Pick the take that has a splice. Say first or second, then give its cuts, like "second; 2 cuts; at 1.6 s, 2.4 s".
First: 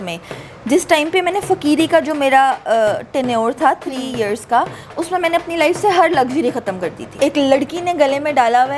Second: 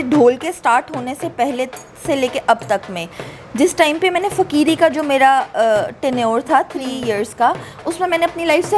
first; 1 cut; at 7.2 s